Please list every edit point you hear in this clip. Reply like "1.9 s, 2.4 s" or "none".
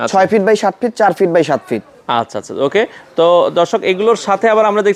none